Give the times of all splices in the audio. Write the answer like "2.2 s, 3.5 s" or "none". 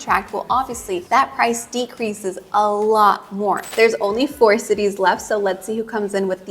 3.7 s